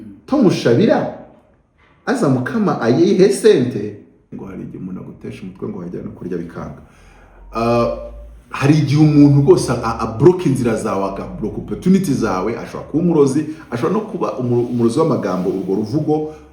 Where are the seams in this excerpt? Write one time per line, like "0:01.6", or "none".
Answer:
0:04.3